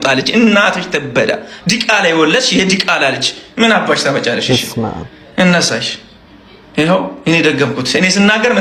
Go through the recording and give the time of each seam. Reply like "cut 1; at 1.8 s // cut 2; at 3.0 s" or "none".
none